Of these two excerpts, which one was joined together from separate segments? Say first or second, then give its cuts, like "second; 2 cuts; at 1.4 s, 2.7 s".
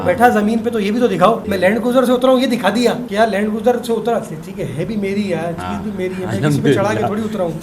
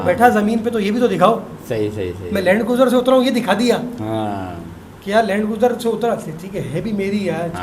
first; 2 cuts; at 1.5 s, 3.0 s